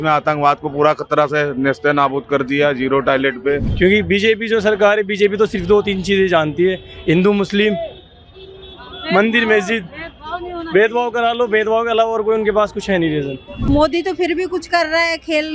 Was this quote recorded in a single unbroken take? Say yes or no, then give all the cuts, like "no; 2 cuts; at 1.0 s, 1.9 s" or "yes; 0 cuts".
no; 2 cuts; at 3.7 s, 13.6 s